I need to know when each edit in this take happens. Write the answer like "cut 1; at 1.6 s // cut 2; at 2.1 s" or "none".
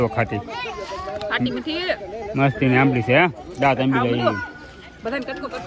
none